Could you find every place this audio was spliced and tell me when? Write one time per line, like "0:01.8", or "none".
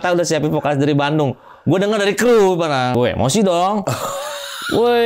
0:02.9